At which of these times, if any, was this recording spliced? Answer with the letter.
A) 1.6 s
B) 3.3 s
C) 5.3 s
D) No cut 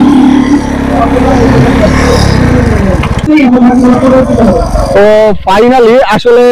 B